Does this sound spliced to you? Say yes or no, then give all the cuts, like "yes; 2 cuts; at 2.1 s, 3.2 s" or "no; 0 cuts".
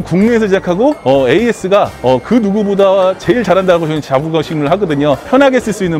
no; 0 cuts